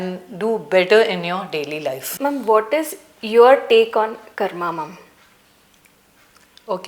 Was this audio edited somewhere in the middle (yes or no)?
no